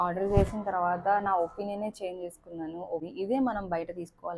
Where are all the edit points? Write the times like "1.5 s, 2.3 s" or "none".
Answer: 3.1 s